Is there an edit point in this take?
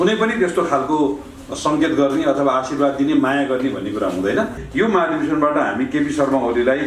yes; 1 cut; at 4.6 s

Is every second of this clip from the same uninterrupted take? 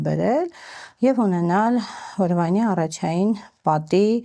yes; 0 cuts

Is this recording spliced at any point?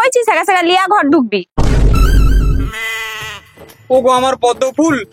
no; 0 cuts

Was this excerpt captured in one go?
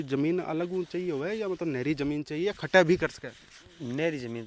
yes; 0 cuts

